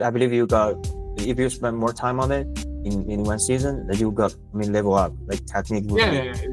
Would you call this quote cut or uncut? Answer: uncut